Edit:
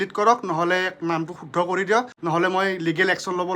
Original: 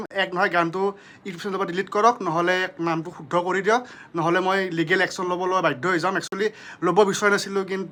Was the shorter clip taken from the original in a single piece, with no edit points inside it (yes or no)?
no